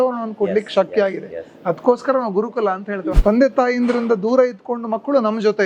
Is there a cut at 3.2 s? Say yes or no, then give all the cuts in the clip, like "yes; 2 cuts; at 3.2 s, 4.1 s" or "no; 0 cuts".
yes; 1 cut; at 3.2 s